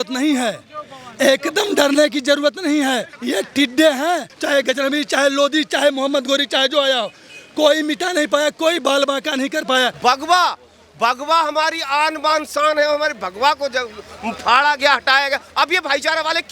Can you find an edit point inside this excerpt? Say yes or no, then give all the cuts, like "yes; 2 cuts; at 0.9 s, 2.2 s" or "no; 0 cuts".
yes; 3 cuts; at 3.1 s, 4.3 s, 9.9 s